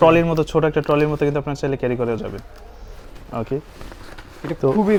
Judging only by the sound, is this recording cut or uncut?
uncut